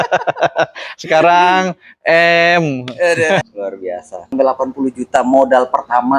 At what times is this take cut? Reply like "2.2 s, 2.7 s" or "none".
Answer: 4.3 s